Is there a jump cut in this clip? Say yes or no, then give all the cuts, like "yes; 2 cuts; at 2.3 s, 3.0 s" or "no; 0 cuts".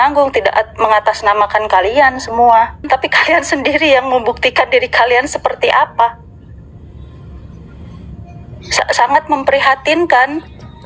yes; 1 cut; at 2.9 s